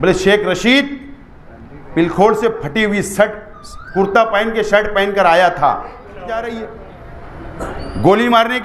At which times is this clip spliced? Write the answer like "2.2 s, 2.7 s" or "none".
6.5 s